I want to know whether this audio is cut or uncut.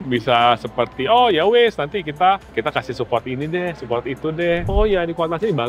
cut